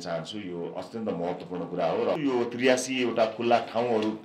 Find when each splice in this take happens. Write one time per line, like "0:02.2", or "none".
0:02.2